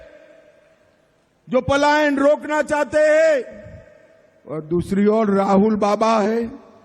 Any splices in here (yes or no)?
yes